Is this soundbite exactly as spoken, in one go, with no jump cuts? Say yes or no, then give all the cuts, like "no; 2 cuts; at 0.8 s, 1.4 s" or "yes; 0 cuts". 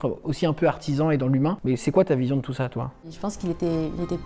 no; 2 cuts; at 1.6 s, 3.1 s